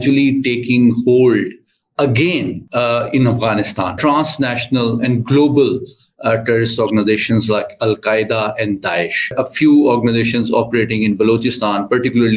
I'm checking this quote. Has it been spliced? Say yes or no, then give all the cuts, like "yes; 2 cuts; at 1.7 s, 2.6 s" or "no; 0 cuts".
yes; 3 cuts; at 2.6 s, 4.0 s, 9.3 s